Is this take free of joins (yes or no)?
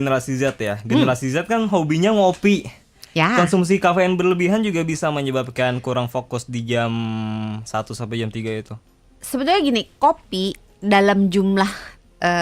yes